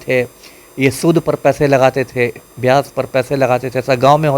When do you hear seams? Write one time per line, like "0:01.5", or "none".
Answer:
none

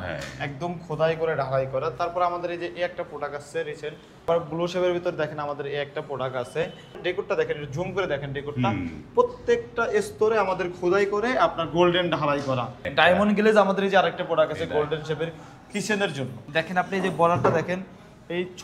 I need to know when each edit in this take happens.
0:04.3
0:06.9
0:12.8
0:16.4

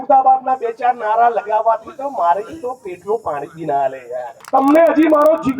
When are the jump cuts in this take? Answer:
0:04.4

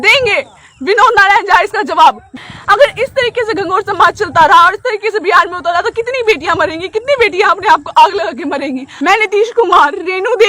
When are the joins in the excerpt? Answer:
0:02.3
0:08.9

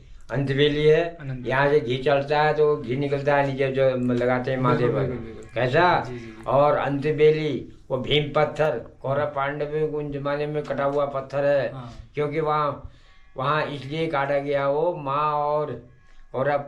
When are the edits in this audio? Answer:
none

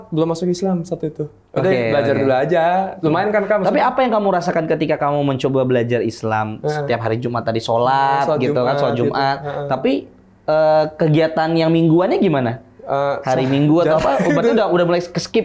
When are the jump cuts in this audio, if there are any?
none

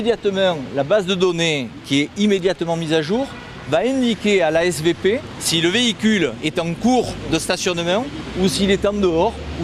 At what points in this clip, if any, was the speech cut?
0:05.4

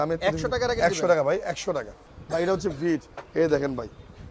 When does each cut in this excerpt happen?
0:02.1

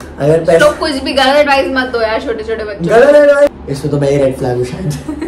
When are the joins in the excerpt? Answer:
0:03.5

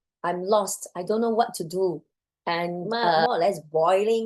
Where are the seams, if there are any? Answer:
0:03.0

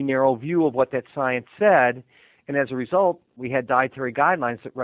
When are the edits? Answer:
0:03.3

